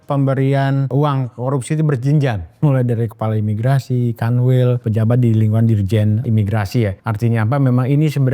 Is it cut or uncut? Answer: cut